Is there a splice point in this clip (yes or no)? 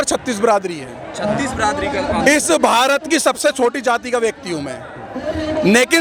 no